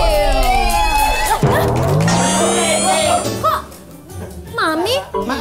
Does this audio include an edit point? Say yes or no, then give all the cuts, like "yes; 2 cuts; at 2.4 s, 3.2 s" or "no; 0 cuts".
yes; 2 cuts; at 1.2 s, 3.2 s